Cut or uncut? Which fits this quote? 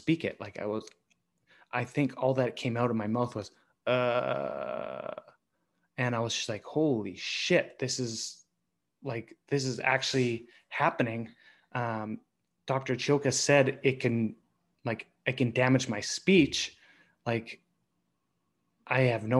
uncut